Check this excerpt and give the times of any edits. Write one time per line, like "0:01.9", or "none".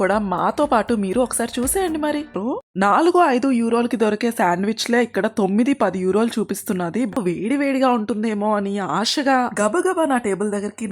0:02.4
0:07.2